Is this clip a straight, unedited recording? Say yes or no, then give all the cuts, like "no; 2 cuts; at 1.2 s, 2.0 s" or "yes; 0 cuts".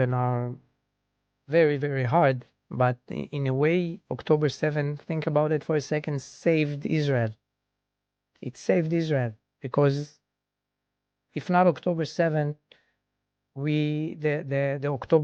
yes; 0 cuts